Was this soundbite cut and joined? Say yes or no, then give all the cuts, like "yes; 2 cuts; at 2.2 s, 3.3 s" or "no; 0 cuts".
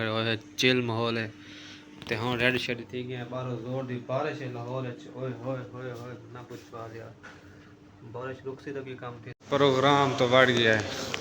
yes; 1 cut; at 9.3 s